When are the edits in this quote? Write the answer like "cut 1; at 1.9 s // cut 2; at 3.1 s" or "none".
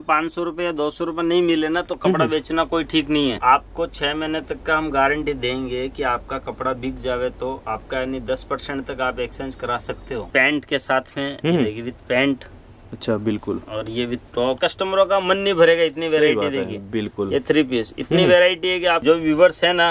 cut 1; at 3.4 s // cut 2; at 10.2 s // cut 3; at 14.6 s // cut 4; at 19.0 s

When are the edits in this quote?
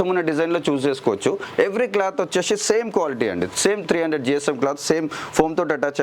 none

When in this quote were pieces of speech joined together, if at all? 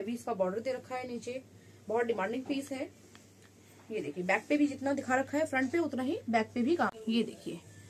cut 1; at 6.9 s

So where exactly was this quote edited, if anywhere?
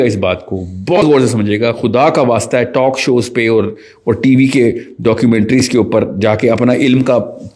cut 1; at 1.0 s

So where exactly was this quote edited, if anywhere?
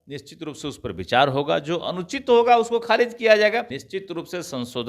cut 1; at 3.8 s

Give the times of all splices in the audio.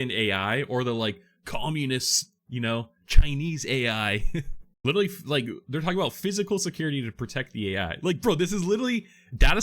cut 1; at 4.6 s

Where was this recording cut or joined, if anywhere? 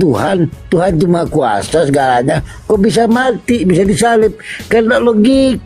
none

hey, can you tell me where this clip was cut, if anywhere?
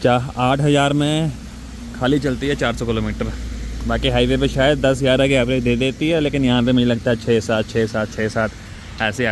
none

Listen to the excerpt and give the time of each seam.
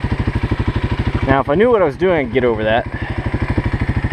none

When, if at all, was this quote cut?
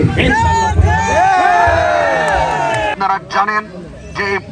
cut 1; at 2.9 s

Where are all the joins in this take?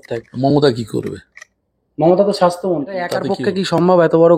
cut 1; at 3.2 s

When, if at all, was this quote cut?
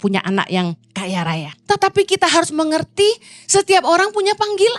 cut 1; at 1.5 s

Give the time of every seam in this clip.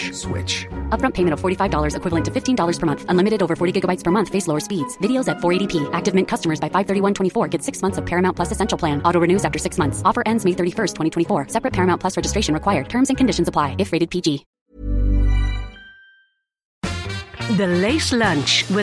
cut 1; at 14.5 s // cut 2; at 16.9 s

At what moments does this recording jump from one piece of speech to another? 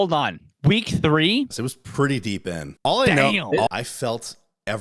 cut 1; at 1.5 s // cut 2; at 2.7 s // cut 3; at 3.7 s

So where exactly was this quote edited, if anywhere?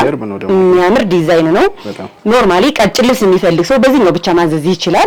none

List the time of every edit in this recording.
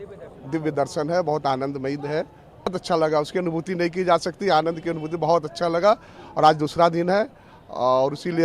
cut 1; at 2.7 s

